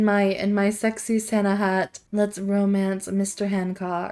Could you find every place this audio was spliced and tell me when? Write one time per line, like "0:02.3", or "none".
0:02.0